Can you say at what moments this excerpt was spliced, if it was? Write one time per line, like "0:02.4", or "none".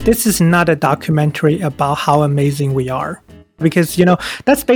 0:03.6